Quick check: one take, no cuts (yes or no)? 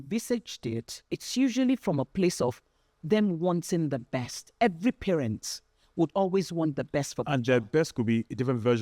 no